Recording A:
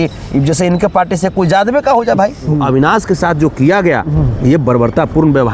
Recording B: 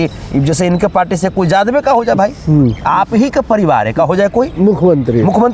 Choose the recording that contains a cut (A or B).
A